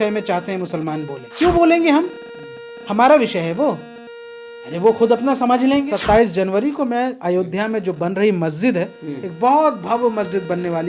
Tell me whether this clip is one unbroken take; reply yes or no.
no